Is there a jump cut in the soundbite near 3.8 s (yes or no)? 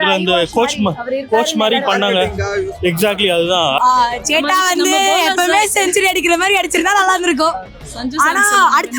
yes